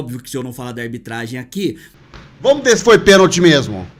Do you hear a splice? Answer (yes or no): yes